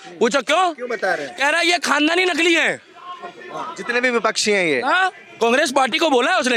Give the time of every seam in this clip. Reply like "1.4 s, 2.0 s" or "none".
none